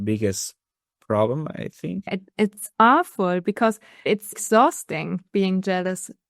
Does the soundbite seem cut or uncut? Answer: cut